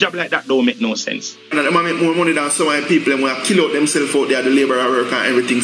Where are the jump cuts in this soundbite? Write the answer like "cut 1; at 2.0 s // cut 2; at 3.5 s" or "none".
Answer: cut 1; at 1.5 s